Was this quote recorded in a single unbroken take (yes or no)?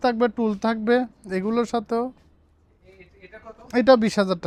yes